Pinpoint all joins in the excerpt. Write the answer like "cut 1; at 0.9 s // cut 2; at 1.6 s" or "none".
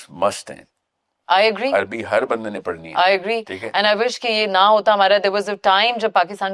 none